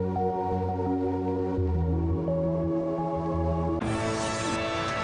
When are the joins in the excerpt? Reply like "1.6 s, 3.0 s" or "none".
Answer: 3.8 s